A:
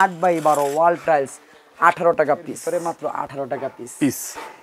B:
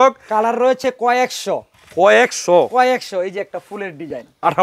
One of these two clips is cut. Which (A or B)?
A